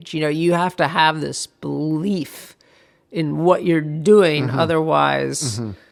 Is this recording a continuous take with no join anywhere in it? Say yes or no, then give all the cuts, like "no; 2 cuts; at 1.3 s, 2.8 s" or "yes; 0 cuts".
yes; 0 cuts